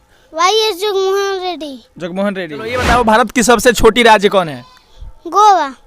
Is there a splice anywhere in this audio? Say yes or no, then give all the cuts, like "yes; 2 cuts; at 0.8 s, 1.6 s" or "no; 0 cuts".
yes; 1 cut; at 2.8 s